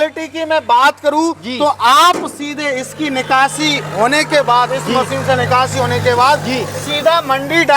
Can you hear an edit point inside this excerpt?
no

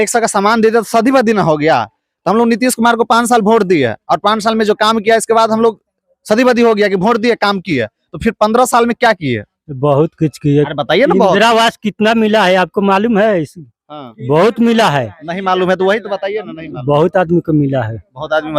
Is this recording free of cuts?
yes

